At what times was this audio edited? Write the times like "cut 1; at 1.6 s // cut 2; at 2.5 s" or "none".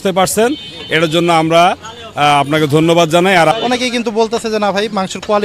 cut 1; at 3.5 s